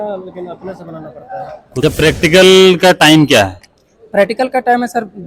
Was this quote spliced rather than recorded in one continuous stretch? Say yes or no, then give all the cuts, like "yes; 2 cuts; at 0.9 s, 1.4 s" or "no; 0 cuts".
yes; 1 cut; at 1.8 s